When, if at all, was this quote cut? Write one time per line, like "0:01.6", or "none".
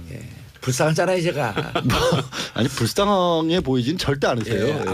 0:01.0